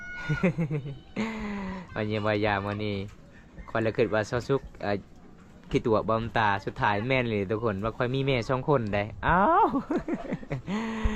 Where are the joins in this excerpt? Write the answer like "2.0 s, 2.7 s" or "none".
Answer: none